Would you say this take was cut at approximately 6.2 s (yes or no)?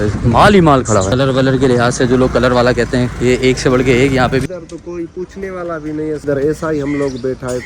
yes